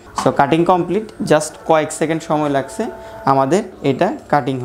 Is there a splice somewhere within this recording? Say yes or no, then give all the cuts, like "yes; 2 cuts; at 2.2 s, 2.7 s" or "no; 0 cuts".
no; 0 cuts